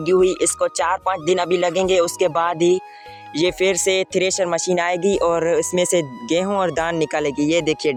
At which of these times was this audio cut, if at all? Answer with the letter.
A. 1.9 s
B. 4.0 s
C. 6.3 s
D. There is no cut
D